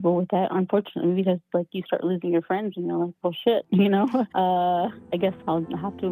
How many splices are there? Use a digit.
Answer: 1